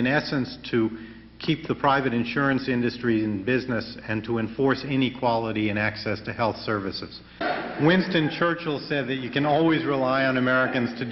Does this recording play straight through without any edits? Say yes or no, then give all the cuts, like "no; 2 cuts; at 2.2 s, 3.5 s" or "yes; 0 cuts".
no; 1 cut; at 7.4 s